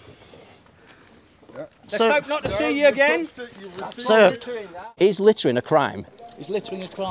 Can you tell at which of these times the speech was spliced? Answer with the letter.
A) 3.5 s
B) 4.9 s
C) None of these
B